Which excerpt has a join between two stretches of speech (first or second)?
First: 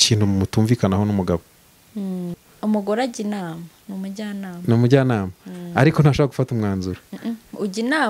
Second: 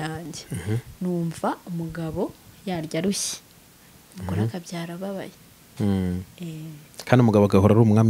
first